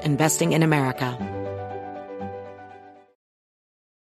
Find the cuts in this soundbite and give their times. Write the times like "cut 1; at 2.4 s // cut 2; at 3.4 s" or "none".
cut 1; at 1.1 s